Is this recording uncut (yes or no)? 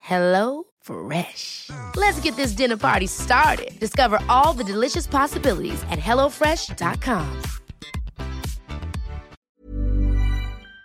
no